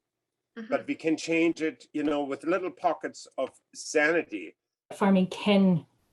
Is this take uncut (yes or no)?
no